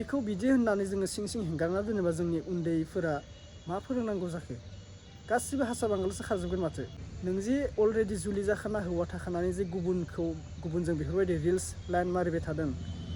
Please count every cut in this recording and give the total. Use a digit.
1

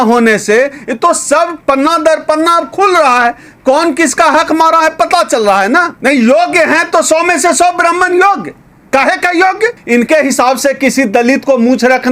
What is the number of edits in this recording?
3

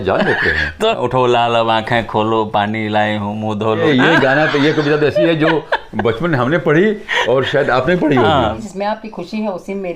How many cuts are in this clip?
3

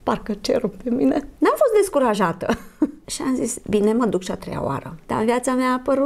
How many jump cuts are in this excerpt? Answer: 3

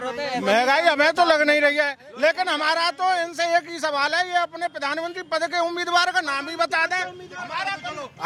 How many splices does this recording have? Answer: 0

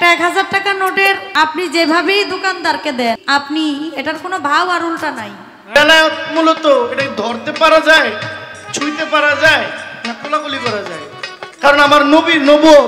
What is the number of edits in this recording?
3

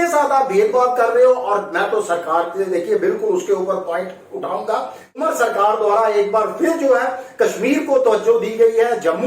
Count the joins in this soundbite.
1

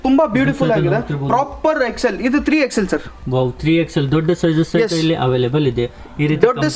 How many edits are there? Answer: 0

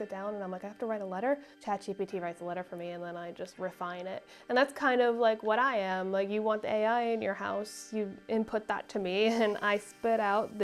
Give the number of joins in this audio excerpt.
1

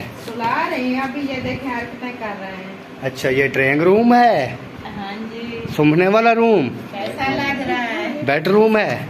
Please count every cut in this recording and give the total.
0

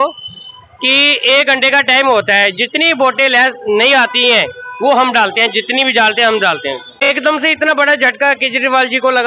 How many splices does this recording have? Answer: 1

